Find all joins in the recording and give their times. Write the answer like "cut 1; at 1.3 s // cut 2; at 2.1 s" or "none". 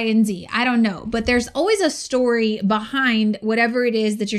none